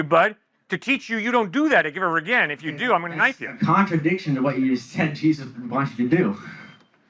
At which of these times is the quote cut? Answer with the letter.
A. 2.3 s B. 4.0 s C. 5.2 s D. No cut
C